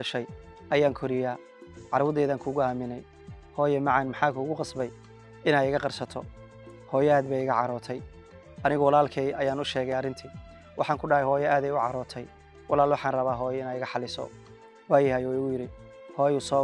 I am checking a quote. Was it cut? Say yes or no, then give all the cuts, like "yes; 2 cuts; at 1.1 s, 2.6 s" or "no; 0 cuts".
no; 0 cuts